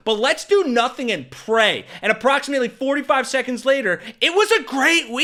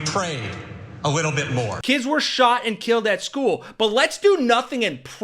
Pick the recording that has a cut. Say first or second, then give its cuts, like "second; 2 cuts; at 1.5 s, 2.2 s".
second; 1 cut; at 1.8 s